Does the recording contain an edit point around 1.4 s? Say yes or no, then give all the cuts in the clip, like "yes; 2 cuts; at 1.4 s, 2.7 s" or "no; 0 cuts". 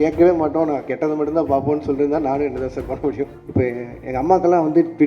no; 1 cut; at 3.4 s